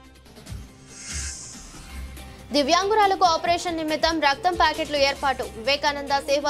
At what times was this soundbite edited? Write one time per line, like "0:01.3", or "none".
0:01.9